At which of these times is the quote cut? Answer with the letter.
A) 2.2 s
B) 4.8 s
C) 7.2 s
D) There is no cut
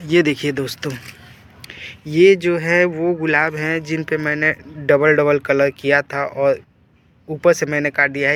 D